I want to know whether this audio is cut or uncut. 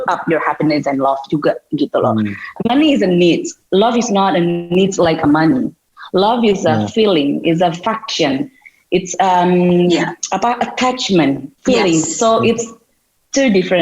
cut